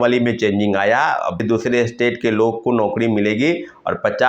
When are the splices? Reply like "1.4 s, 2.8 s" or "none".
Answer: 1.4 s

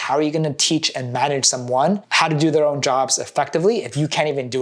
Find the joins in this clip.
none

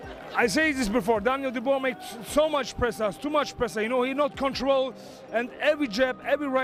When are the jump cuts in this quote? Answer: none

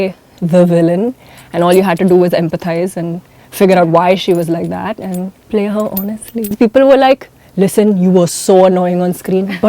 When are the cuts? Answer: 1.3 s, 5.4 s, 6.5 s

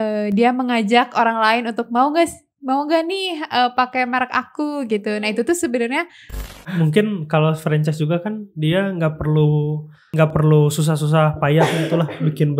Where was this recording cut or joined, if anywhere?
6.6 s, 10.1 s

